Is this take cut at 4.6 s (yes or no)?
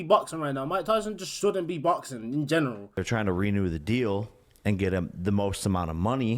no